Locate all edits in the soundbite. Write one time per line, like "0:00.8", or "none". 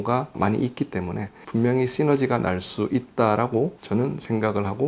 0:01.4